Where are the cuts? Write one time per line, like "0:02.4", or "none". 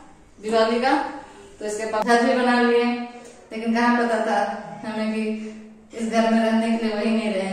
0:02.0